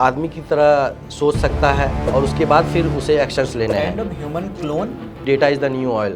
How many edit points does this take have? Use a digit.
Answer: 2